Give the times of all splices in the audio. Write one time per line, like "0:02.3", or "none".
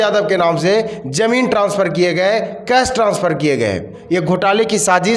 0:03.9